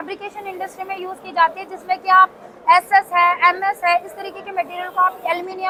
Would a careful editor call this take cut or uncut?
uncut